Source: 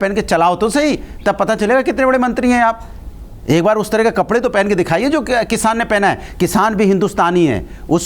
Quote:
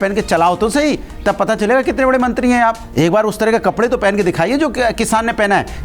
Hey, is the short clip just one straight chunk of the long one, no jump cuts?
no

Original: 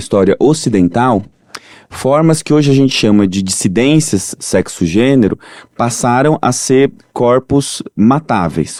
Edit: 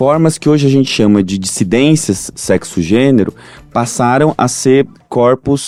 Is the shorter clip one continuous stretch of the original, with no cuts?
yes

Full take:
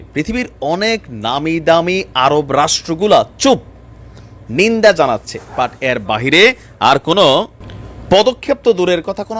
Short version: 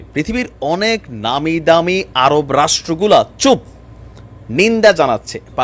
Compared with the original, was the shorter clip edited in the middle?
no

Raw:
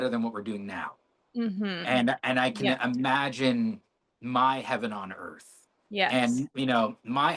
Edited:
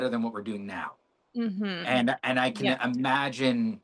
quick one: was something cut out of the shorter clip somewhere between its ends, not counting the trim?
no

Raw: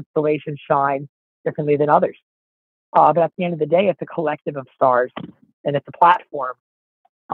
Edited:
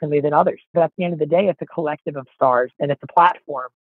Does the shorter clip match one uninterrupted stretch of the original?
no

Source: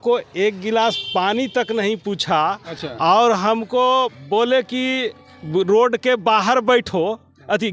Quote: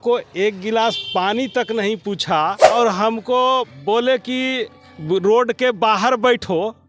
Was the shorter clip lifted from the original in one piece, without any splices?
no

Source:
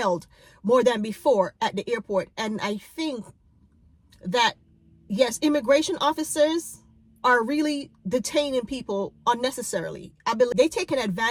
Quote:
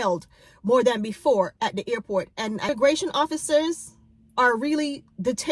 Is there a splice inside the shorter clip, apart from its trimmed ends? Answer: yes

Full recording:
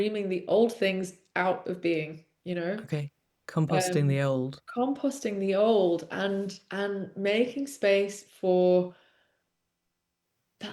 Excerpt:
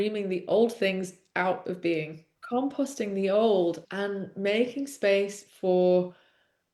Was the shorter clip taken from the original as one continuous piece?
no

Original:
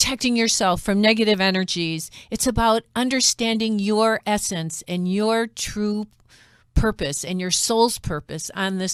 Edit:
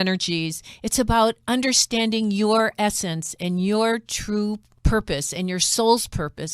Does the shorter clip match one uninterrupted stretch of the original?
no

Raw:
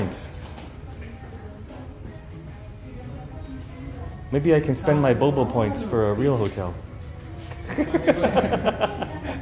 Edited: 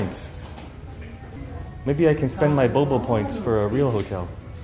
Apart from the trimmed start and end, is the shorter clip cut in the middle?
yes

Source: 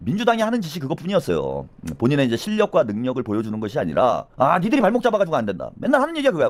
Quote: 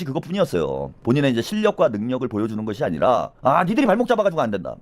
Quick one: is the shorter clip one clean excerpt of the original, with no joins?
no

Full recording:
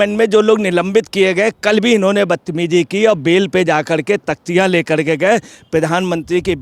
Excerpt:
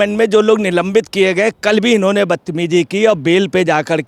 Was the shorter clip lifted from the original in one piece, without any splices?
yes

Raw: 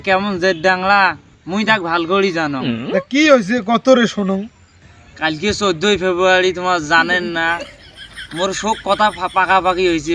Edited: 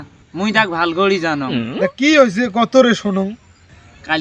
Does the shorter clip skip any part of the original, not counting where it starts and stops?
no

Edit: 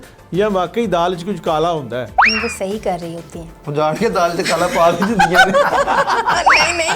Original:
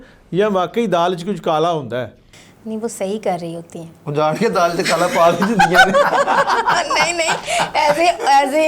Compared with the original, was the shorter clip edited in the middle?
yes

